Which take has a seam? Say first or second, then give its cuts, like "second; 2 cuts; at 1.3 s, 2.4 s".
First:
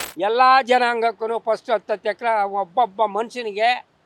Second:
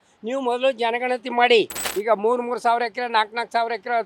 second; 1 cut; at 1.8 s